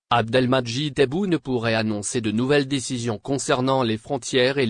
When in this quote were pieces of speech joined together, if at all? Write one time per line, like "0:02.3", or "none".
0:03.7